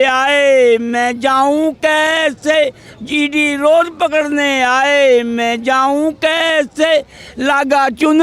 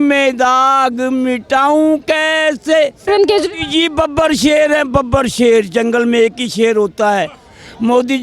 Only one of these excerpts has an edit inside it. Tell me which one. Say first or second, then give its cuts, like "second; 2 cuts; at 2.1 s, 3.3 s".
second; 1 cut; at 3.1 s